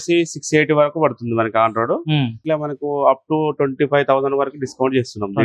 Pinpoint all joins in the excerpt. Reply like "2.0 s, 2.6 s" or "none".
2.4 s